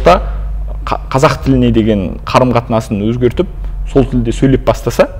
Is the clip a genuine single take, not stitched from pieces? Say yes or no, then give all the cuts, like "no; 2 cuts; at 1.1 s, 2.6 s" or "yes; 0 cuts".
yes; 0 cuts